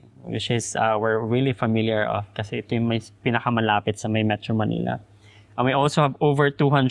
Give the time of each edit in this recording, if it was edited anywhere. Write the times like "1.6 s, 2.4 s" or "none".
none